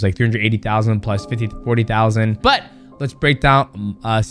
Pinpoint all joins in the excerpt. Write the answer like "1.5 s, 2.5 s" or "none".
2.4 s